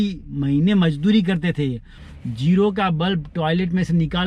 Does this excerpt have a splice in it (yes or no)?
yes